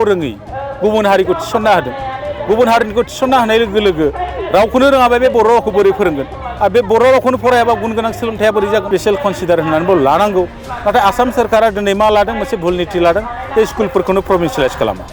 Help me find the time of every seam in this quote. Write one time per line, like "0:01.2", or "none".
0:08.9